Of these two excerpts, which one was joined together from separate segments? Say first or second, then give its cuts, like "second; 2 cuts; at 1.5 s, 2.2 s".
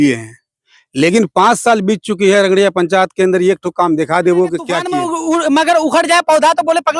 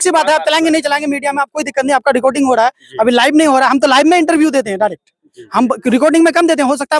first; 1 cut; at 4.9 s